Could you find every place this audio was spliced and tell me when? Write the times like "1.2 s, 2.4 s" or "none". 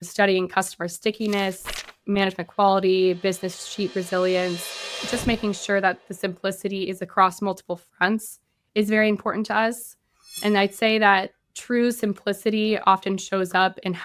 10.4 s